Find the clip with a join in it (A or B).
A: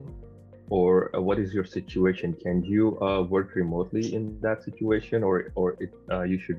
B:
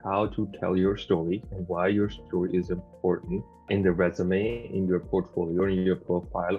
B